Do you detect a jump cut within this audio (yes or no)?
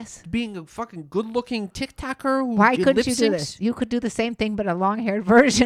no